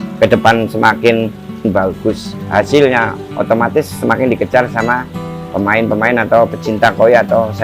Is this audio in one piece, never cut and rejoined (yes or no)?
no